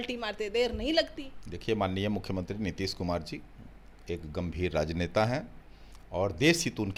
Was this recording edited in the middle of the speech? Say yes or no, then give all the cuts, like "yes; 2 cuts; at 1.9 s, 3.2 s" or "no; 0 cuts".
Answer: no; 0 cuts